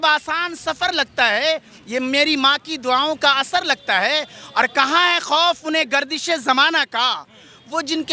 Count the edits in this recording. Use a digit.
0